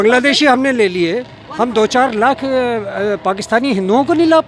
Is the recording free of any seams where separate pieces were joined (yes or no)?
yes